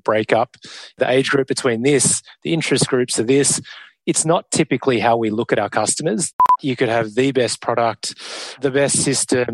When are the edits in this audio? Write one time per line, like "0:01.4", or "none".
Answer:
0:01.0
0:06.4
0:08.6